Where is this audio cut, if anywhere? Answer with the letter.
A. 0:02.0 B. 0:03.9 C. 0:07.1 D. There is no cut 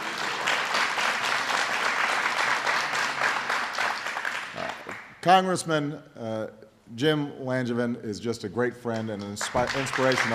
B